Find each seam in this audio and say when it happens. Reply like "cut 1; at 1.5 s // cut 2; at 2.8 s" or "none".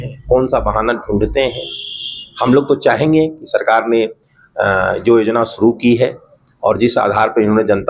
none